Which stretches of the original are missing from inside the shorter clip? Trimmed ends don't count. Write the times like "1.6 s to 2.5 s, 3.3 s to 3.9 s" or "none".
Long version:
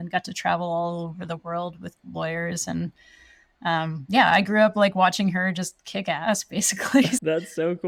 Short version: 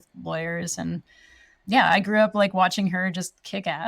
3.5 s to 4.0 s